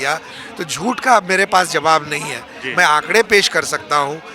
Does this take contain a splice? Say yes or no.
no